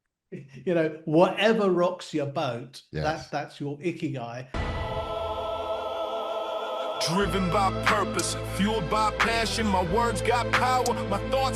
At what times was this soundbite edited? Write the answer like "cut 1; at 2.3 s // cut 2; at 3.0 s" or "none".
cut 1; at 4.5 s